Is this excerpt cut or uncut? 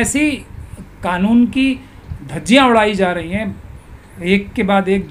uncut